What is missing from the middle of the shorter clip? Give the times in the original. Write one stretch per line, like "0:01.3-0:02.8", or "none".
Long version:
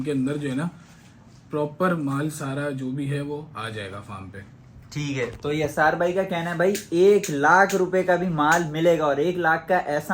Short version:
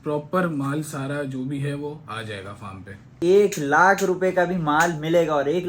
0:04.6-0:06.8